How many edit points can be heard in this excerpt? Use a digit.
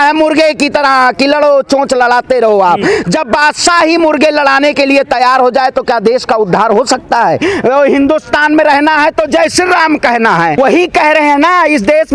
2